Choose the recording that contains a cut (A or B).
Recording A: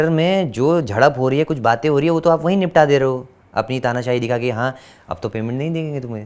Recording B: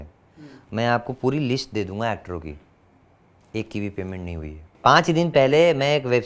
B